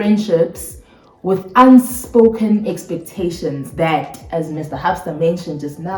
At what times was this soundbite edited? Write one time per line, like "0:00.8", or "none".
none